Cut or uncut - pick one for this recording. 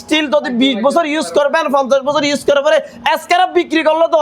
uncut